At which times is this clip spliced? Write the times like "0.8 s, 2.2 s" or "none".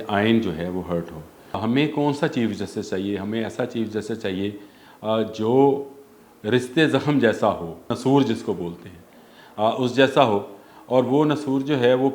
1.6 s, 7.9 s